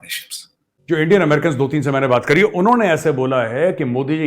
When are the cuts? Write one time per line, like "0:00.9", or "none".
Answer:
none